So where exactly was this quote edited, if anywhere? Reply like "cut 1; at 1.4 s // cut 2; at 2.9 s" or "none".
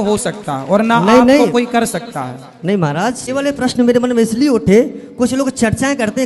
cut 1; at 3.2 s